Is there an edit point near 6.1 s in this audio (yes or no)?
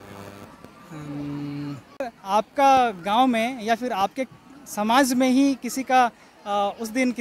no